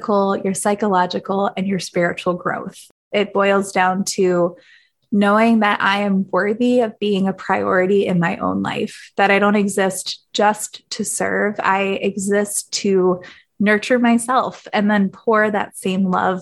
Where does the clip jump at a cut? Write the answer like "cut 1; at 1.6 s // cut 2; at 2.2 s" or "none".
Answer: cut 1; at 2.9 s

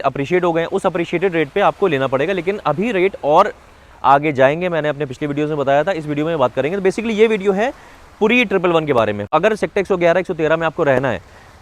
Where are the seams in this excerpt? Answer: cut 1; at 9.3 s

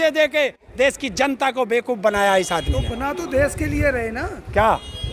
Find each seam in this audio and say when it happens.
none

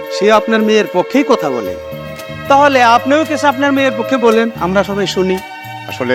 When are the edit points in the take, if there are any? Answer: none

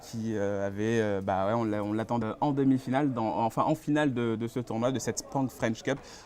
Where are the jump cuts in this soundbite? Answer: none

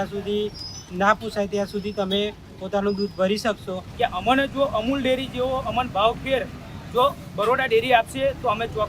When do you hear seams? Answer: cut 1; at 3.8 s

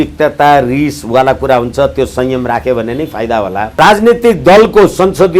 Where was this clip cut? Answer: cut 1; at 3.8 s

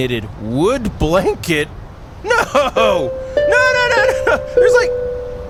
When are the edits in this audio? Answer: none

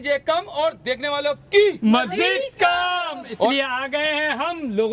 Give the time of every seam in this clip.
none

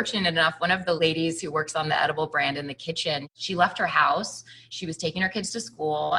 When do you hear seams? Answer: cut 1; at 1.0 s

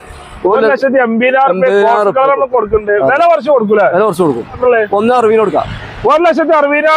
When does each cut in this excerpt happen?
cut 1; at 4.6 s

